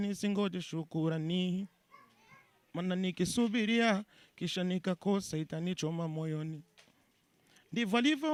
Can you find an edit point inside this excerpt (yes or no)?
no